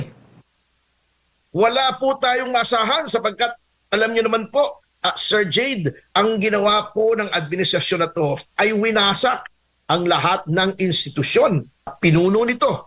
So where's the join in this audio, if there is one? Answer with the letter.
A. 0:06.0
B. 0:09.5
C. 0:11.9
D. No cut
C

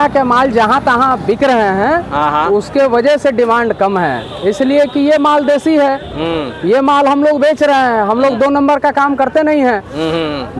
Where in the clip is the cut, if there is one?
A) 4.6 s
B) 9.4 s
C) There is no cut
C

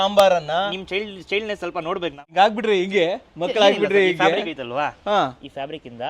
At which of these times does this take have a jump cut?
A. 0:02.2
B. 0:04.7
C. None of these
A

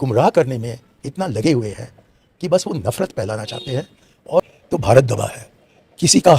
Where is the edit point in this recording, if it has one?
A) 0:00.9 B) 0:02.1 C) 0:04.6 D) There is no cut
C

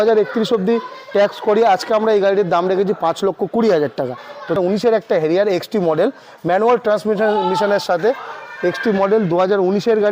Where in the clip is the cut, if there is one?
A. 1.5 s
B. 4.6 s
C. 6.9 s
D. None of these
B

